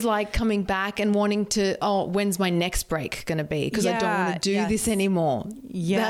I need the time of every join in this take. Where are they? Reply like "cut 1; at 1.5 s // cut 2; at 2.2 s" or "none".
none